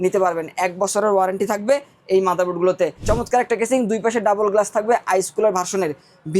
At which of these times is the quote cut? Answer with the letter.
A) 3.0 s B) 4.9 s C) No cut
A